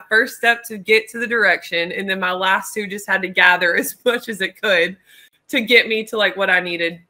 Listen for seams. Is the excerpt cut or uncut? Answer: uncut